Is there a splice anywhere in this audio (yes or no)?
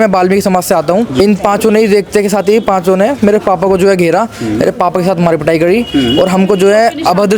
yes